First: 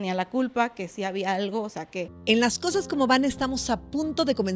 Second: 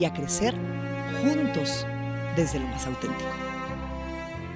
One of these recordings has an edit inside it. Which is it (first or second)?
first